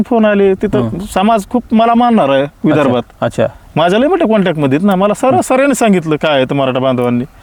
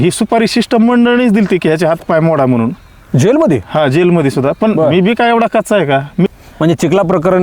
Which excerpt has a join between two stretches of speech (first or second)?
second